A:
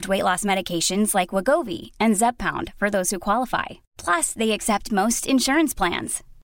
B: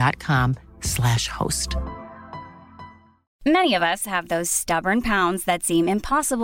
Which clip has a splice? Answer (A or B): B